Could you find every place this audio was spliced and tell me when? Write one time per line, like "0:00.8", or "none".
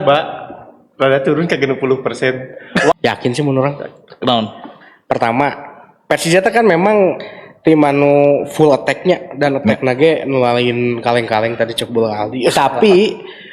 0:02.9
0:12.5